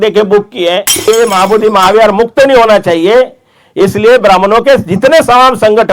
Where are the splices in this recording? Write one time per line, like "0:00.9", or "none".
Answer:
0:01.0